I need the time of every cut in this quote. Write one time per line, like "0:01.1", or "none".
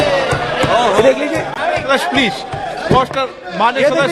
none